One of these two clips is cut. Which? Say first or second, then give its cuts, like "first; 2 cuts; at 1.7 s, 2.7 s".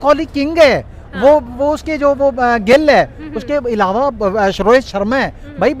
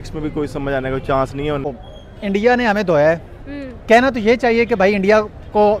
second; 1 cut; at 1.8 s